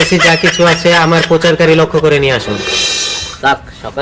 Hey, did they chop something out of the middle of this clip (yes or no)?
yes